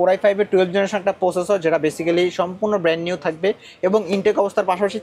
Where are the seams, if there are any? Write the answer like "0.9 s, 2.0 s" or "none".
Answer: none